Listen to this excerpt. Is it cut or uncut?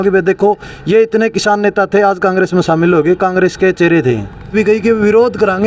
cut